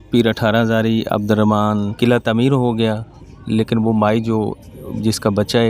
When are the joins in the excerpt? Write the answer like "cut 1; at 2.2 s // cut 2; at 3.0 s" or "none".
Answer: cut 1; at 1.9 s